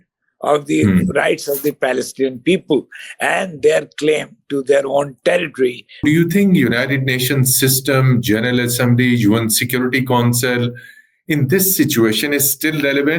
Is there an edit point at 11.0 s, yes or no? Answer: no